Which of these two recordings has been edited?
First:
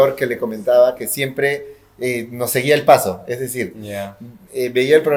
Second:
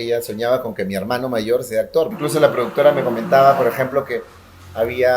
second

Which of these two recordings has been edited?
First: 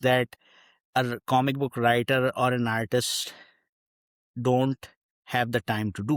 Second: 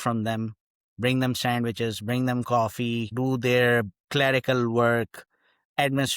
second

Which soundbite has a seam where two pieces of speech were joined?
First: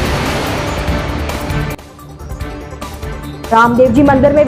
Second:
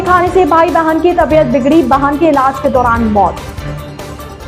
first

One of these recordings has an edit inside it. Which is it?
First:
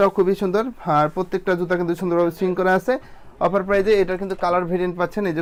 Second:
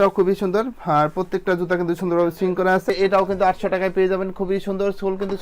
second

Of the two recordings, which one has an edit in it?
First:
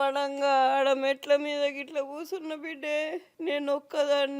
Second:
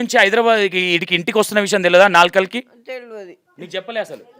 first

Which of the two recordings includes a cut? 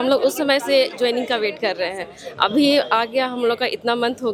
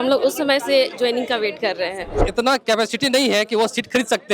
second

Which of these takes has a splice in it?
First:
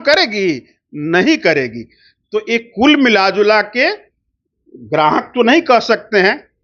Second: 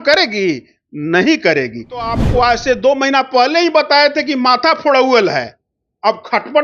second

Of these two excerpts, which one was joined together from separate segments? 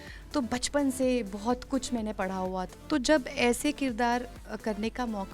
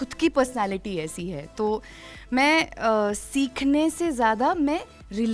first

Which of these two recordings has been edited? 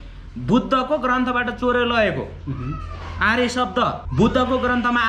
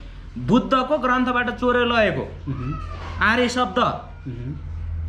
first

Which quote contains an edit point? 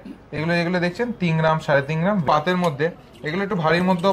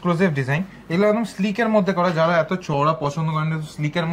first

